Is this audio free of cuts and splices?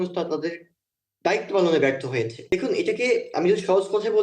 no; 1 cut; at 2.5 s

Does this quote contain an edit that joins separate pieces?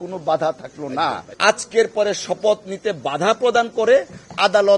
yes; 1 cut; at 1.2 s

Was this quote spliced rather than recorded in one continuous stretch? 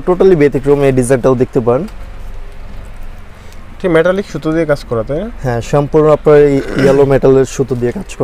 no; 0 cuts

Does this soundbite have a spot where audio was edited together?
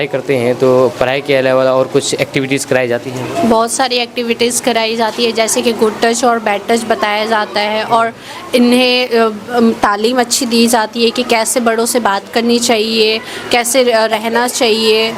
no; 0 cuts

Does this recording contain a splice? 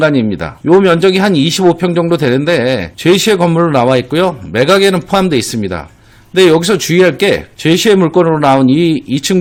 no; 0 cuts

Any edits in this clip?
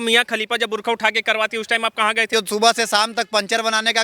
yes; 1 cut; at 2.2 s

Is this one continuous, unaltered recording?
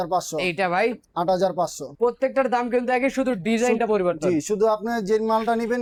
yes; 0 cuts

